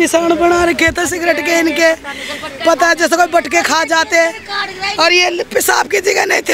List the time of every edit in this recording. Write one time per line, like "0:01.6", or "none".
none